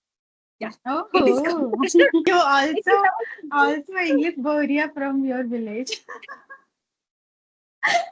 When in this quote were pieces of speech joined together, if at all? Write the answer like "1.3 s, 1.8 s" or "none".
2.3 s